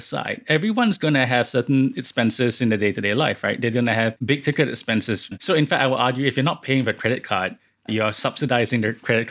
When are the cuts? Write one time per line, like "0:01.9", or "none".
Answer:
0:04.2
0:05.4